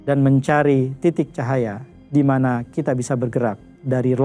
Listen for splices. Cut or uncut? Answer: uncut